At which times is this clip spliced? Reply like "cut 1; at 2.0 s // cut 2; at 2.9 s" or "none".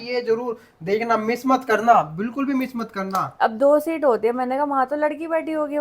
cut 1; at 3.3 s

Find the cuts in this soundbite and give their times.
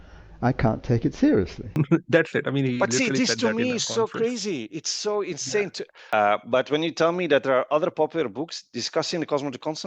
cut 1; at 1.6 s // cut 2; at 6.1 s

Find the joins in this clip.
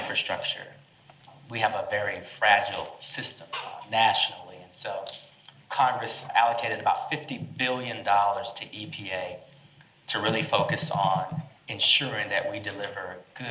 cut 1; at 1.2 s // cut 2; at 3.7 s // cut 3; at 6.2 s

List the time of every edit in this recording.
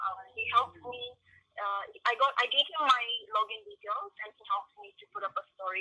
none

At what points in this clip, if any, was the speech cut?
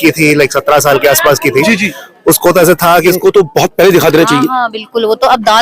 cut 1; at 3.2 s

